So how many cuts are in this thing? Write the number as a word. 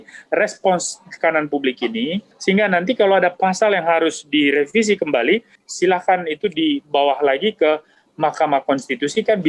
two